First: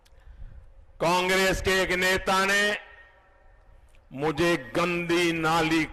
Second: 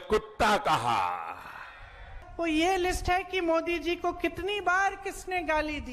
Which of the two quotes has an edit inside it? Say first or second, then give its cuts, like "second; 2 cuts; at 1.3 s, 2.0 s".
second; 1 cut; at 2.2 s